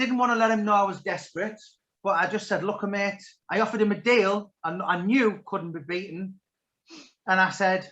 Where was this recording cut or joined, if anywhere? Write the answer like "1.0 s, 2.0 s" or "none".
3.3 s